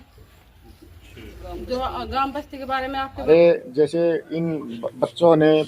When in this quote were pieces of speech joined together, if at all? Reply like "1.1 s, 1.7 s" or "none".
3.3 s